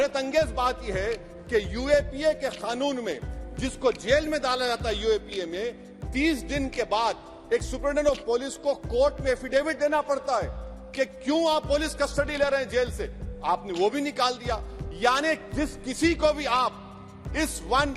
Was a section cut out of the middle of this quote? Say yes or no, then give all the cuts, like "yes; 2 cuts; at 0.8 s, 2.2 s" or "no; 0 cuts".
no; 0 cuts